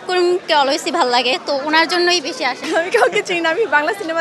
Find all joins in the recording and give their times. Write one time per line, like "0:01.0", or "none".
0:02.6